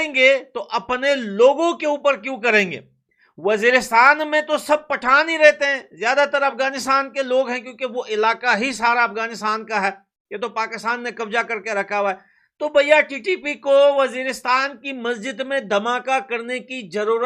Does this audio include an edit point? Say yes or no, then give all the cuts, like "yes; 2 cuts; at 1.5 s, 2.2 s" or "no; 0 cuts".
no; 0 cuts